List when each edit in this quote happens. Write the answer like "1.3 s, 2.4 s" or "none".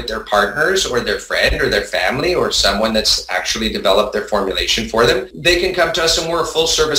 5.3 s